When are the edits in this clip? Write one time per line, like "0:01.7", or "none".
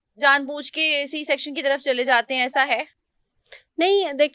none

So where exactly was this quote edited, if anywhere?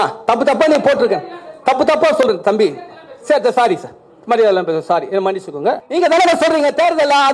0:05.8

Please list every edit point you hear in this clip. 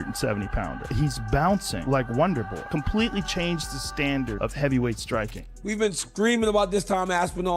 0:05.1

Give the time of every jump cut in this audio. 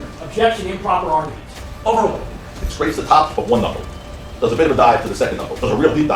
0:02.3

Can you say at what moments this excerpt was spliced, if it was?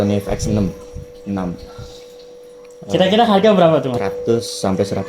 0:04.0

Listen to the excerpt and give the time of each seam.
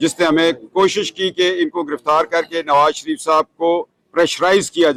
none

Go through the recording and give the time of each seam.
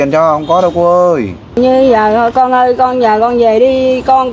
0:01.6

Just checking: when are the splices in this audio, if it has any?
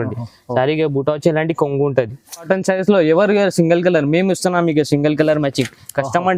0:02.4

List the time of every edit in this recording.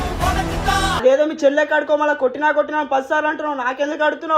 0:01.0

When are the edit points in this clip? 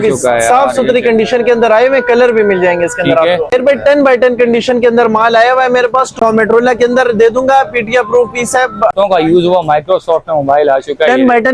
0:03.5
0:06.2
0:08.9

